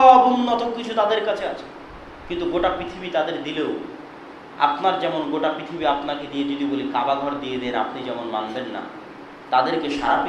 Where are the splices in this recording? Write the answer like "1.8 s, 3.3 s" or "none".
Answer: none